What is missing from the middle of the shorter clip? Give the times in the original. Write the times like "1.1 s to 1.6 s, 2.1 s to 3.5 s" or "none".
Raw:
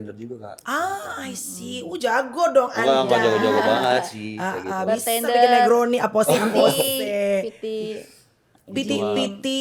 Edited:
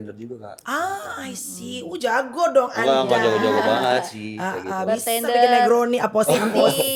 none